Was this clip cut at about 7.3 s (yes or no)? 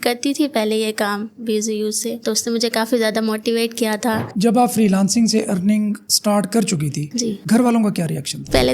no